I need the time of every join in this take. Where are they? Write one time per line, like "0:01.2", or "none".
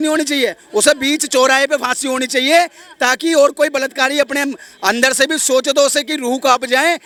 none